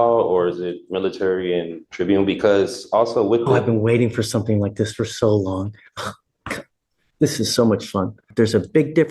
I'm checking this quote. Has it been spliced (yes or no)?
yes